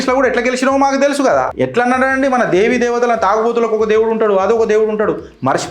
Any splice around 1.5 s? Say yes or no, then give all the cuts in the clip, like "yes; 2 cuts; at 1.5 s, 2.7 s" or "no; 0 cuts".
yes; 1 cut; at 1.5 s